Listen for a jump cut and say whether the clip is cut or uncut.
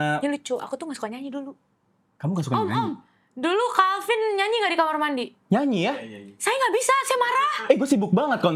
uncut